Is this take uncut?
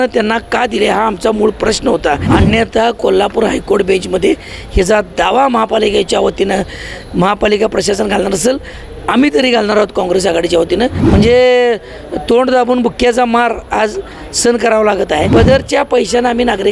no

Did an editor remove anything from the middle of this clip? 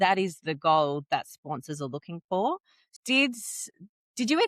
yes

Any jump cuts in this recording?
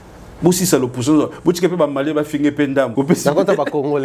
yes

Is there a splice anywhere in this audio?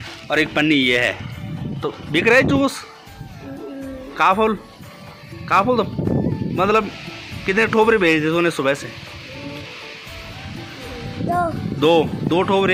no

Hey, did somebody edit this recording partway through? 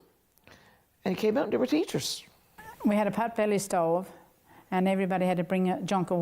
yes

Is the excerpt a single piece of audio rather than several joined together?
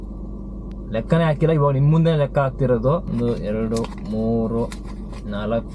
no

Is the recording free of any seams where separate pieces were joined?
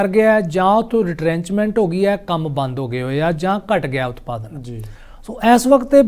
yes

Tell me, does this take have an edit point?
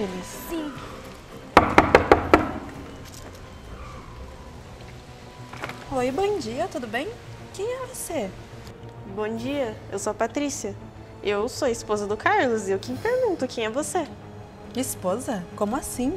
no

